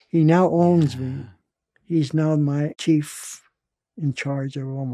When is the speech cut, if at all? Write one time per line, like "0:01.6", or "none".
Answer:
0:02.8